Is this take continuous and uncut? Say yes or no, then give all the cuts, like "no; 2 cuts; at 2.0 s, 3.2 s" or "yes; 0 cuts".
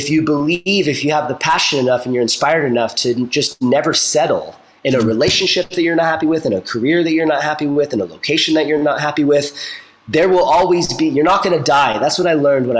yes; 0 cuts